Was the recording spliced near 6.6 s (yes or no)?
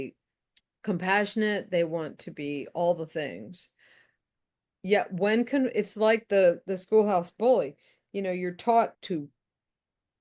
no